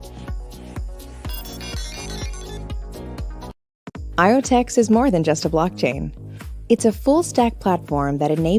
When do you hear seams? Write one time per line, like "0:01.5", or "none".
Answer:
0:03.5